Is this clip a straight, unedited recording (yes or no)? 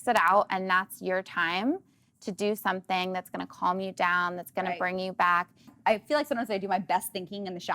no